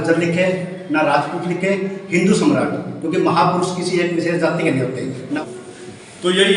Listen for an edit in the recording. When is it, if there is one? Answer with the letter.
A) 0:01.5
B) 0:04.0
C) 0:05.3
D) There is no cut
C